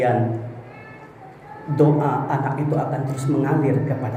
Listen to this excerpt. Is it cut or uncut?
uncut